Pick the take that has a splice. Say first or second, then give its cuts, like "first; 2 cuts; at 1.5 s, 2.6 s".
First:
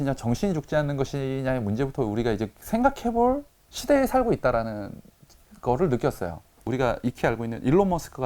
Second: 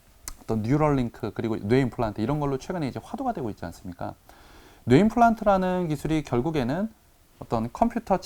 first; 1 cut; at 6.5 s